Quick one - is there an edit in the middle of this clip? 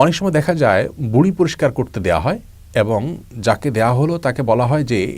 no; 0 cuts

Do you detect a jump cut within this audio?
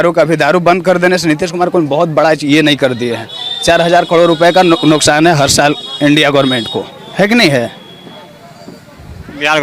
no; 0 cuts

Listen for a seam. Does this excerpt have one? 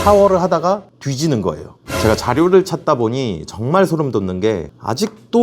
yes; 1 cut; at 1.8 s

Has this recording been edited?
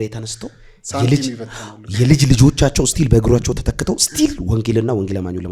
no; 0 cuts

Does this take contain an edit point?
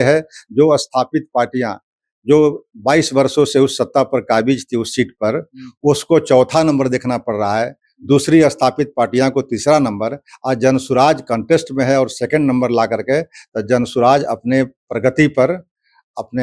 no; 0 cuts

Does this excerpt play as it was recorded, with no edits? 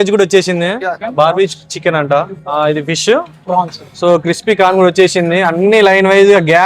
no; 3 cuts; at 1.0 s, 2.3 s, 3.8 s

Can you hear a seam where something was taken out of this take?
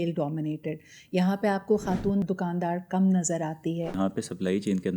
yes; 2 cuts; at 2.2 s, 3.9 s

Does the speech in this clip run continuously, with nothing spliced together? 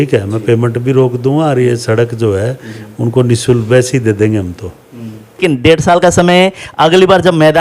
no; 1 cut; at 5.4 s

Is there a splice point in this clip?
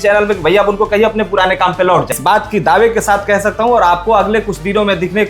yes; 1 cut; at 2.2 s

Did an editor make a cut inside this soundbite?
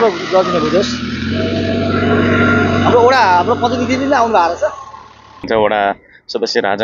yes; 1 cut; at 5.4 s

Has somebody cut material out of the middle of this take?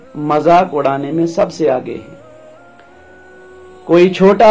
no; 0 cuts

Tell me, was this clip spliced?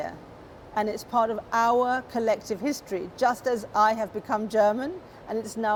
no; 0 cuts

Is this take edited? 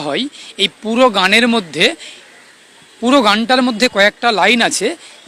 no; 0 cuts

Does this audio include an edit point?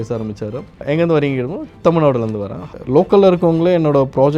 yes; 1 cut; at 2.6 s

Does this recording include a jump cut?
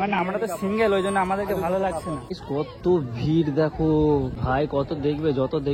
yes; 2 cuts; at 2.4 s, 4.4 s

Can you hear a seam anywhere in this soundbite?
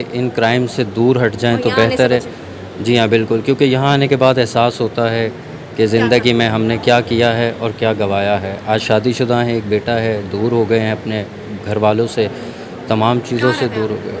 no; 0 cuts

